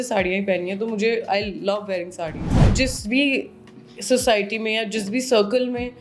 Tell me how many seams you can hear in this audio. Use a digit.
1